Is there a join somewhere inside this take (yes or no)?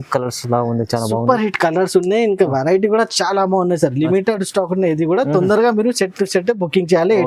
no